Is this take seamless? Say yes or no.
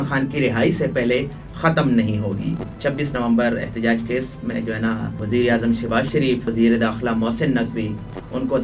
no